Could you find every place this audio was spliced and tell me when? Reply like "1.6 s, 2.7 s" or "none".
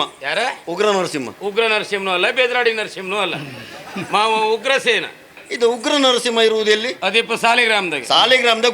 5.4 s